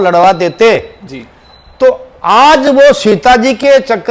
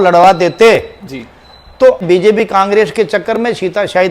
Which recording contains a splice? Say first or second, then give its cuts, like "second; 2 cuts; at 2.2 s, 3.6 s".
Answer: second; 1 cut; at 2.0 s